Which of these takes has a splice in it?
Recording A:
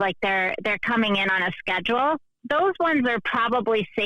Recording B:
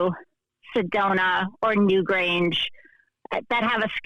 A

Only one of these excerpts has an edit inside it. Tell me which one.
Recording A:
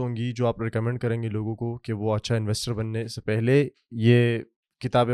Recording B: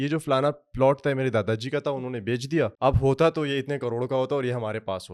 B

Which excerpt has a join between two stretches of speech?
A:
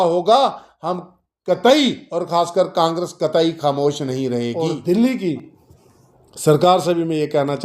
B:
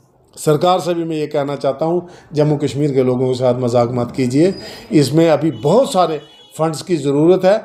A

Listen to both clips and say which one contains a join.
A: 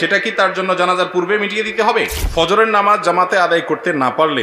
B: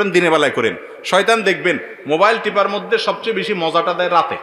A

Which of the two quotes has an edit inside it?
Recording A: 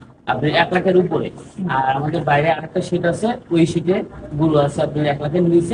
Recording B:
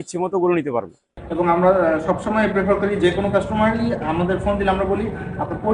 B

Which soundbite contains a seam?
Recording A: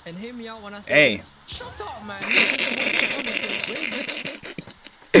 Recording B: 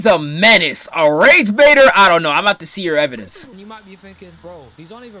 B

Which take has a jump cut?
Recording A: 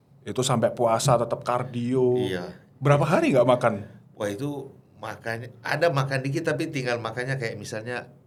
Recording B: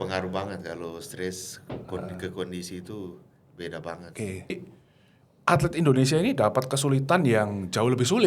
B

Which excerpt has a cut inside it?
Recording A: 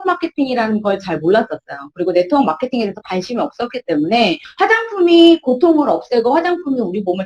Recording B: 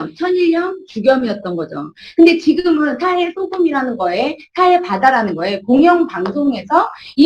A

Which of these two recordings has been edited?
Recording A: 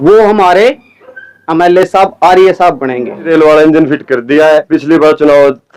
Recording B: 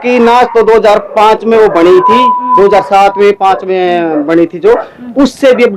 A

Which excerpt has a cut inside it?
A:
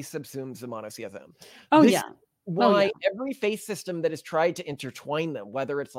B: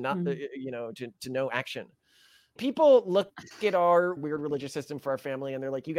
B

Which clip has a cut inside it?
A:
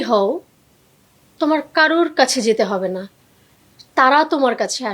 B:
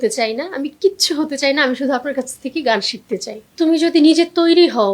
B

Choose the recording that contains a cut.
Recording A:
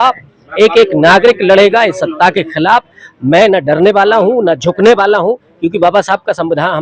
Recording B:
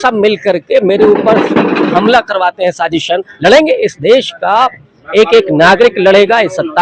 B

